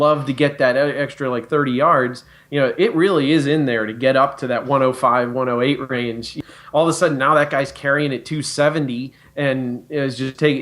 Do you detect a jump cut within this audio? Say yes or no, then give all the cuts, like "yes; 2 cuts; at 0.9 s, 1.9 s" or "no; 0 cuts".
yes; 1 cut; at 6.3 s